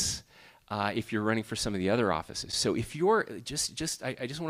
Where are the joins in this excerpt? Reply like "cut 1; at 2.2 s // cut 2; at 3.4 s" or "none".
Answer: none